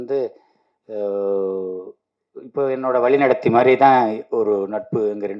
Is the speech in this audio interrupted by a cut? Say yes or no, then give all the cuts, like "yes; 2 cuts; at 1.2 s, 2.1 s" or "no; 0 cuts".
no; 0 cuts